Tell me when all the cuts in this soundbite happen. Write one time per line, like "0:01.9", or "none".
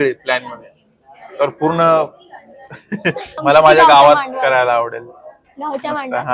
0:03.3